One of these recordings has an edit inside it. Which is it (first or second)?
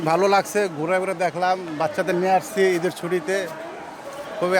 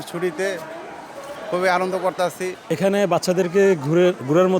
second